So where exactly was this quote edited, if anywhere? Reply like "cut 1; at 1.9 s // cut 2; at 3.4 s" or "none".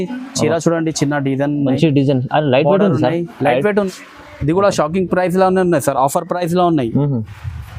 cut 1; at 3.9 s